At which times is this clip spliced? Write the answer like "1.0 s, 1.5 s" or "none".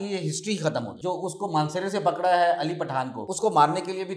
0.9 s, 3.2 s